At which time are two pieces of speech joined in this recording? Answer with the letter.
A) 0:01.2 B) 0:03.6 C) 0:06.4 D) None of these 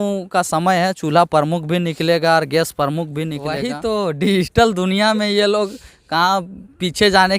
B